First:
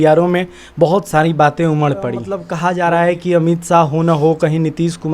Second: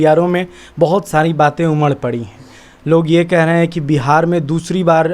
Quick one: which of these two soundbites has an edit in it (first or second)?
first